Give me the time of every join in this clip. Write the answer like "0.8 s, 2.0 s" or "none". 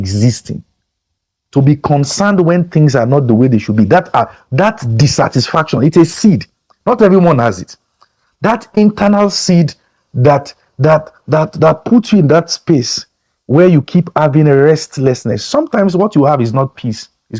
none